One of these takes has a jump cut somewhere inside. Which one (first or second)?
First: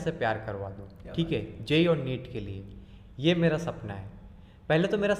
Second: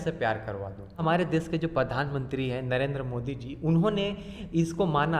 second